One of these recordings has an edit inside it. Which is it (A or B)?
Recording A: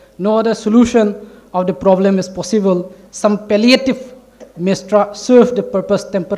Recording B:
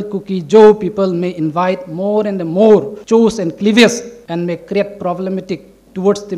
B